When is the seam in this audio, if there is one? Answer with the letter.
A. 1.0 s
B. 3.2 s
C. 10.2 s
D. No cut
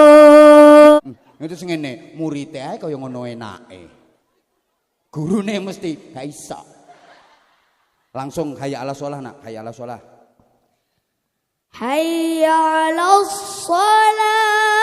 A